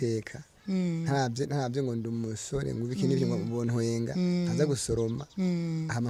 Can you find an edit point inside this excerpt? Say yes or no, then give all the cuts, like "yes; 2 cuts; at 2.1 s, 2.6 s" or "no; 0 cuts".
no; 0 cuts